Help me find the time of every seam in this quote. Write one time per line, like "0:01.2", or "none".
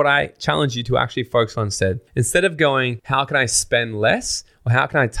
0:02.0
0:03.0